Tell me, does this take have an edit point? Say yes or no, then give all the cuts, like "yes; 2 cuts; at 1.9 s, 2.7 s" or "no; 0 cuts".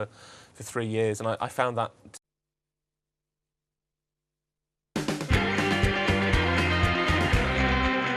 no; 0 cuts